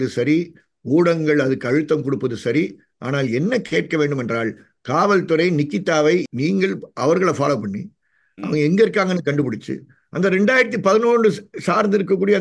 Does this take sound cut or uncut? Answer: cut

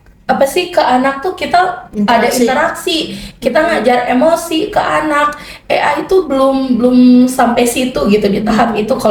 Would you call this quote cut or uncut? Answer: uncut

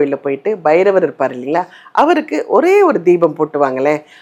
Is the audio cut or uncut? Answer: uncut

